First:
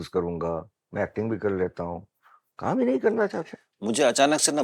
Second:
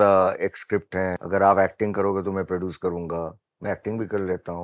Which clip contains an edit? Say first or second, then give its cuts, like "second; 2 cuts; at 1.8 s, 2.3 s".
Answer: second; 1 cut; at 1.2 s